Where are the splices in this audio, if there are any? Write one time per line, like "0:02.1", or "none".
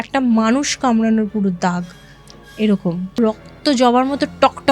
0:03.2